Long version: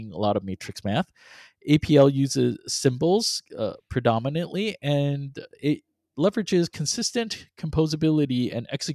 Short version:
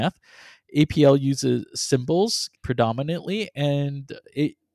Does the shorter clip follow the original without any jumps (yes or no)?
no